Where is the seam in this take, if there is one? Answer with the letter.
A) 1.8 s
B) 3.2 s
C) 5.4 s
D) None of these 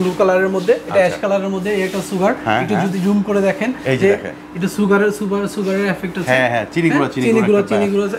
D